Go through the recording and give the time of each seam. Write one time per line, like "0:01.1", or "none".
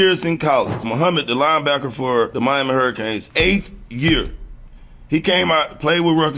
0:02.5
0:04.3

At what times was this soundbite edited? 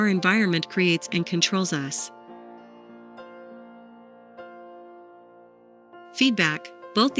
0:02.0
0:06.2

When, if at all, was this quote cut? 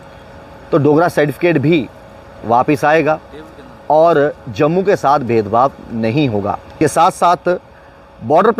0:06.8

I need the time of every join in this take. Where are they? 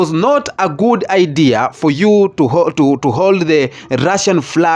none

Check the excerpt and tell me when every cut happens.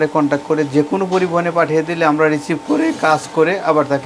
none

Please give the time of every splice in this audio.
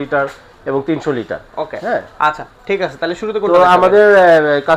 none

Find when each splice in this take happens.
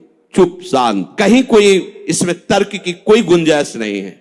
none

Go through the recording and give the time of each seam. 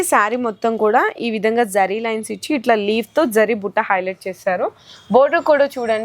none

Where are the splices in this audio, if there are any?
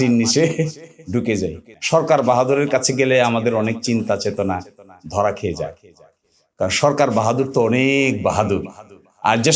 0:01.7

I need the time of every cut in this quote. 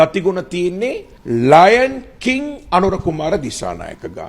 0:01.1

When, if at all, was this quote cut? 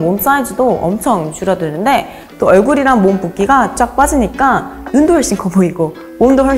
0:02.2

